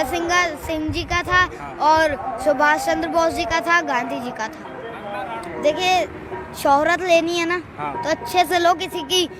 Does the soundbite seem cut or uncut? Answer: cut